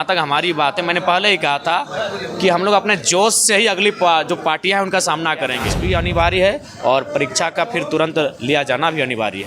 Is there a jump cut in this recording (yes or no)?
yes